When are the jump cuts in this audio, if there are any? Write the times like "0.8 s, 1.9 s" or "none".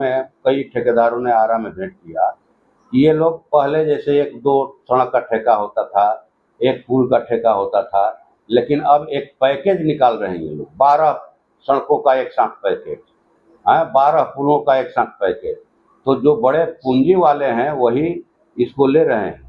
none